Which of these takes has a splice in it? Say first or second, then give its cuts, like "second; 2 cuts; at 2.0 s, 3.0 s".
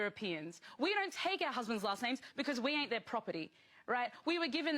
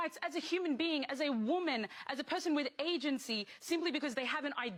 first; 1 cut; at 2.3 s